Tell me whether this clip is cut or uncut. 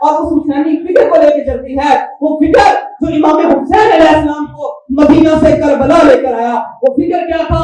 uncut